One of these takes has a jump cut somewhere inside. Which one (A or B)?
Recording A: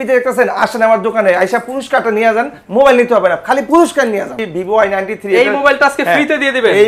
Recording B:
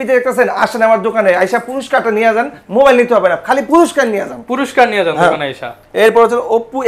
A